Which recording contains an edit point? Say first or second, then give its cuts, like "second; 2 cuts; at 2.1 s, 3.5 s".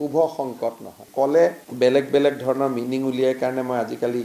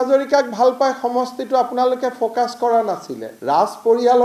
first; 1 cut; at 1.0 s